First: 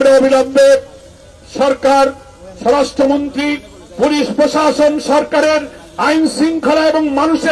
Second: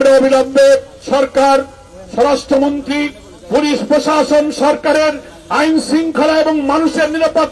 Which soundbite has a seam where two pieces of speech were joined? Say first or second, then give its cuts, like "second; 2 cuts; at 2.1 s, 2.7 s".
second; 1 cut; at 0.9 s